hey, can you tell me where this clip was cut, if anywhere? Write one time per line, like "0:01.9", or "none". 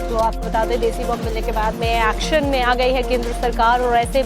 0:01.0